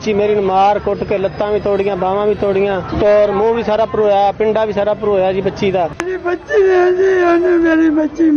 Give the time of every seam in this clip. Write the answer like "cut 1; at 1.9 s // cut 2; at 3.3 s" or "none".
none